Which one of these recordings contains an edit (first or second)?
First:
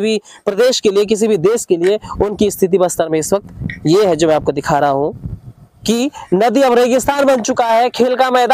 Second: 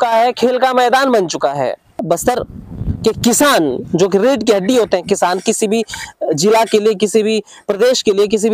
second